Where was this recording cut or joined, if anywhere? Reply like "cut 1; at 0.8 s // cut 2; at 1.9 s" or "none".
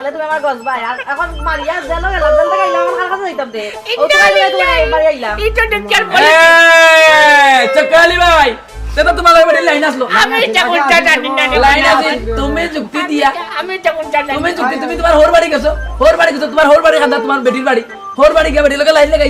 none